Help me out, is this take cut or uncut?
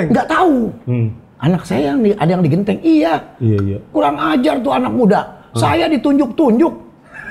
uncut